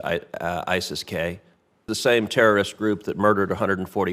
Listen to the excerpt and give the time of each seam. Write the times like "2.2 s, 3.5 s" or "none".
1.9 s